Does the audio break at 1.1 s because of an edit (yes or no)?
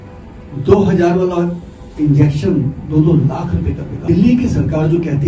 no